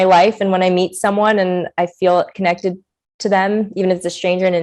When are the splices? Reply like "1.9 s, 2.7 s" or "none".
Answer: none